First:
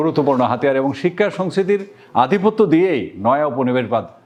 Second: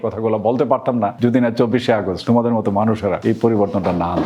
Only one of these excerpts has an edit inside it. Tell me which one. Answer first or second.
second